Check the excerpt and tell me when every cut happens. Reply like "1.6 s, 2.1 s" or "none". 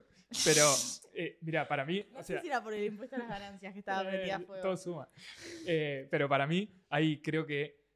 none